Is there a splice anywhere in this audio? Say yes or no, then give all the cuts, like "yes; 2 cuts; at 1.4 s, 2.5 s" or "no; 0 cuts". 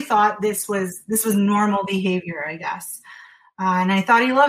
no; 0 cuts